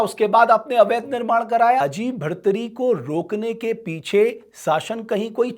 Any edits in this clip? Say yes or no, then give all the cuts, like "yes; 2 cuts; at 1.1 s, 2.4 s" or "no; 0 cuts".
yes; 1 cut; at 1.8 s